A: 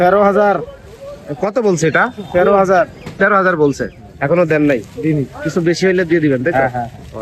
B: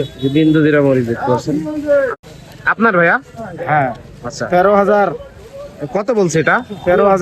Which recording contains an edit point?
B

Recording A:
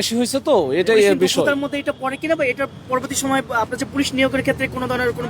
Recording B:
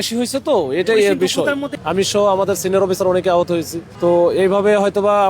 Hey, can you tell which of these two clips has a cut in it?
B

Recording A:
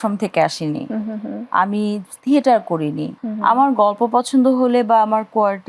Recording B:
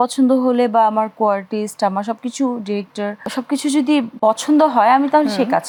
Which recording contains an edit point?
A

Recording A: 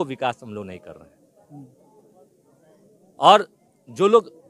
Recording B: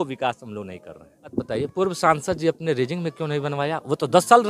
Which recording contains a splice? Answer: B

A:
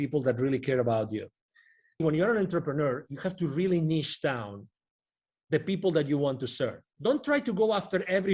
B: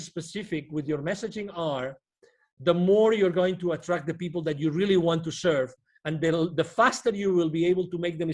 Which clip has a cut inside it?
A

